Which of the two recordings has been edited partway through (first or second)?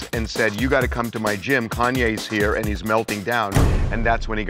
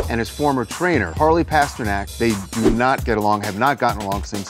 second